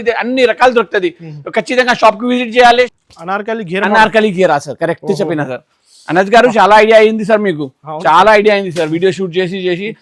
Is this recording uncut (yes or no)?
no